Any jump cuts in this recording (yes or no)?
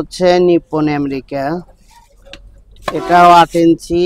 no